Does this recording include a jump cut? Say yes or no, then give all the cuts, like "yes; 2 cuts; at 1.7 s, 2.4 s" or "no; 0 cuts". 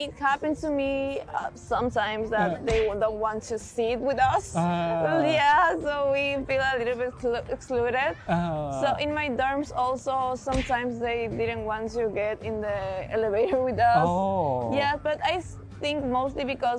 no; 0 cuts